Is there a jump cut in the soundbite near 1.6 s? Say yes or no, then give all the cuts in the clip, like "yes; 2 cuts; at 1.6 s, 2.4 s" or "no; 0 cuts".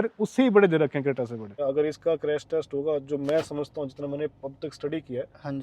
yes; 1 cut; at 1.6 s